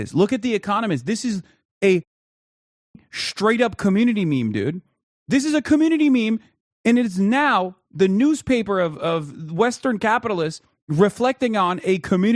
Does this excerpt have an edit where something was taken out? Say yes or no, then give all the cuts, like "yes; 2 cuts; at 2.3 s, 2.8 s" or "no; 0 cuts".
no; 0 cuts